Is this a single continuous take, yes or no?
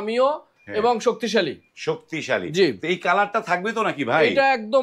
yes